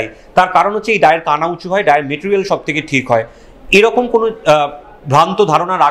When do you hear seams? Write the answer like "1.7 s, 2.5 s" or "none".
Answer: none